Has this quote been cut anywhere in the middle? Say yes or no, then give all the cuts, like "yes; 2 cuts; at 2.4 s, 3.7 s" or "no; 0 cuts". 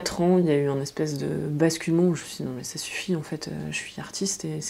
no; 0 cuts